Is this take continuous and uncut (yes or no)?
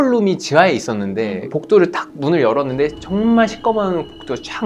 no